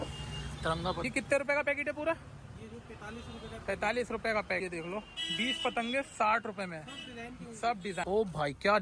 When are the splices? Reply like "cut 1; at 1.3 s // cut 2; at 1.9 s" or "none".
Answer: cut 1; at 1.0 s // cut 2; at 4.6 s // cut 3; at 8.0 s